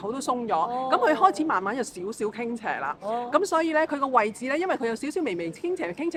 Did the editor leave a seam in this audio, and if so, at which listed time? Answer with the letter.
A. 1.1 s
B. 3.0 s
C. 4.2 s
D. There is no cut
D